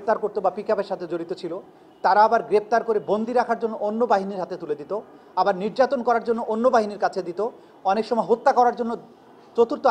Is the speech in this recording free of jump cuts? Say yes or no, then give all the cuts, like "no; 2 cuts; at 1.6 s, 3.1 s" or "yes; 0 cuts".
yes; 0 cuts